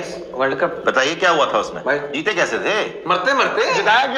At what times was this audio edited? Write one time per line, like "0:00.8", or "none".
0:02.1